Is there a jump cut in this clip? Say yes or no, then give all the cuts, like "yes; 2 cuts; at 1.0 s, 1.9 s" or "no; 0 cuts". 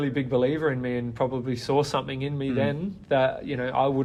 no; 0 cuts